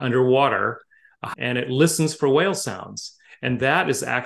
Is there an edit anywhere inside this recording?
yes; 1 cut; at 1.2 s

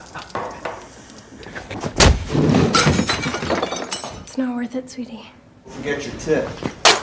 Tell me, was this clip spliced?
yes; 1 cut; at 5.7 s

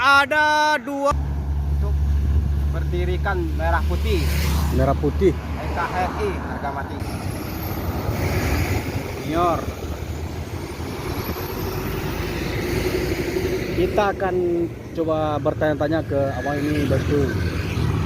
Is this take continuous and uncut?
no; 2 cuts; at 1.1 s, 7.0 s

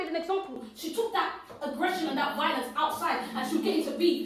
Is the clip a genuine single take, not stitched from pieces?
yes; 0 cuts

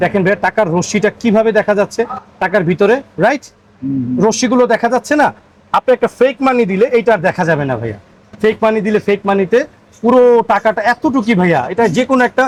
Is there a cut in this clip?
no; 0 cuts

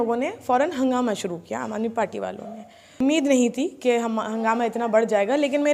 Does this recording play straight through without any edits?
no; 1 cut; at 3.0 s

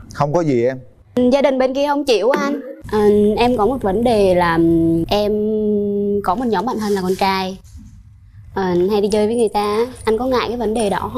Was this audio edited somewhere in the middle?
yes; 1 cut; at 2.7 s

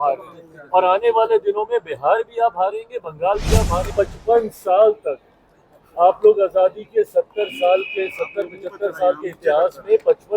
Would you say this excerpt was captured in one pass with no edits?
no; 1 cut; at 3.9 s

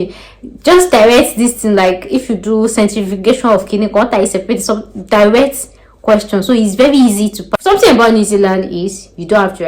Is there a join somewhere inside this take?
yes; 1 cut; at 7.4 s

